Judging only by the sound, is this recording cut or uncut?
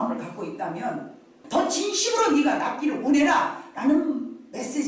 cut